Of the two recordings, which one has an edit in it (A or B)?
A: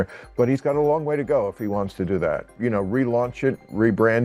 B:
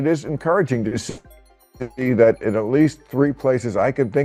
A